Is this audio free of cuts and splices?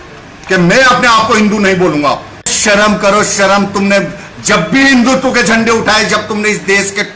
no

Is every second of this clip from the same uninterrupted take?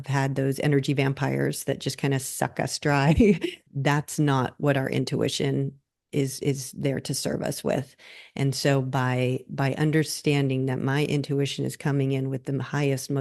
no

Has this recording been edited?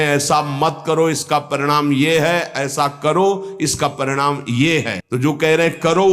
yes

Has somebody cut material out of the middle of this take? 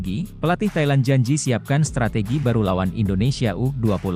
no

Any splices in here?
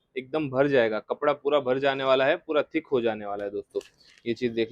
no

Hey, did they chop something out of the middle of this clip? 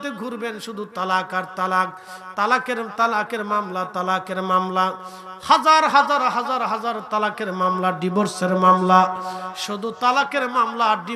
no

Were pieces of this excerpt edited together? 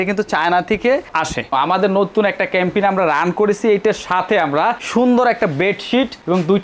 yes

